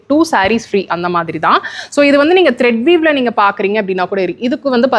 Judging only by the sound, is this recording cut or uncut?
uncut